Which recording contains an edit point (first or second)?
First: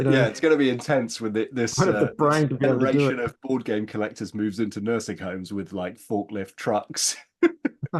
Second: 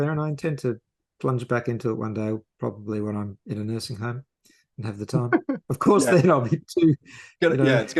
second